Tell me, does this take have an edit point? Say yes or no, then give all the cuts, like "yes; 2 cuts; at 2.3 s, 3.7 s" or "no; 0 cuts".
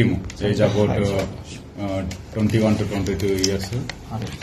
no; 0 cuts